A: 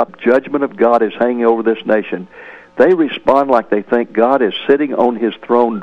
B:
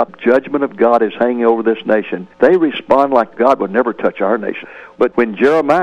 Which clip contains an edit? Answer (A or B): B